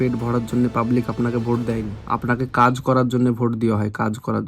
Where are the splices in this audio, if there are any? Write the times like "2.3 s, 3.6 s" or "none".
1.9 s